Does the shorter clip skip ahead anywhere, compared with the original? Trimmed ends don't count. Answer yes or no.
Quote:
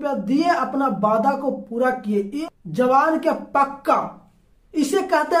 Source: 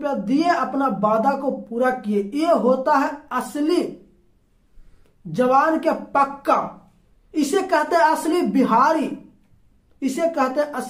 yes